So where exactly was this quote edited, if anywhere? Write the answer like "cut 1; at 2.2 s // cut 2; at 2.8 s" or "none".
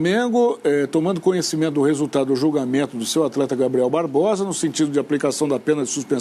none